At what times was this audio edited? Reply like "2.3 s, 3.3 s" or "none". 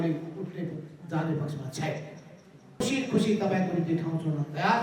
2.8 s